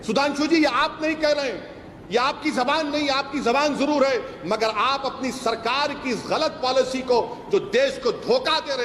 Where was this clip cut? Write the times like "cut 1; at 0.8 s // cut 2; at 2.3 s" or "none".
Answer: none